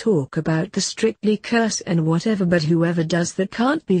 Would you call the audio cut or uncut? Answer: uncut